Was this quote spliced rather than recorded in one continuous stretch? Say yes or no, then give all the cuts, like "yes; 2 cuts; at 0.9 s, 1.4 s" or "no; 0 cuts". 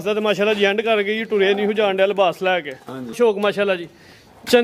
yes; 1 cut; at 3.2 s